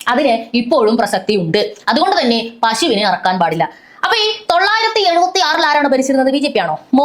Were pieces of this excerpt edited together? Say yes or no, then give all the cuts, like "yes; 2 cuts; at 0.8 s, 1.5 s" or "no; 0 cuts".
no; 0 cuts